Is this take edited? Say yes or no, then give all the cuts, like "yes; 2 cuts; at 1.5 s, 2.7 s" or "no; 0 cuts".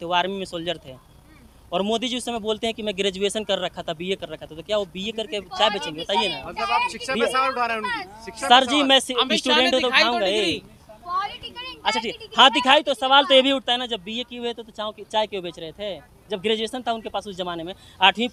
no; 0 cuts